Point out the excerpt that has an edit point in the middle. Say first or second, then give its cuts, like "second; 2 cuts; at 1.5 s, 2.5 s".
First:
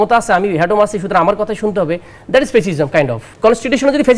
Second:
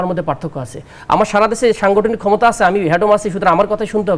first; 1 cut; at 3.2 s